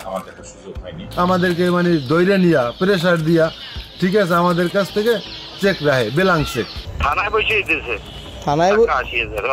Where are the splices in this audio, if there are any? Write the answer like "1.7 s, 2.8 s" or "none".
0.9 s, 6.9 s